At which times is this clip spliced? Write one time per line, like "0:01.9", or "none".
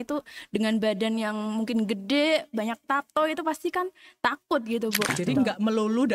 0:05.1